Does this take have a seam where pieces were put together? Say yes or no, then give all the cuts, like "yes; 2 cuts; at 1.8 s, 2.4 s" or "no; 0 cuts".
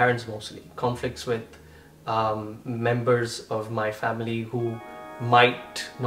no; 0 cuts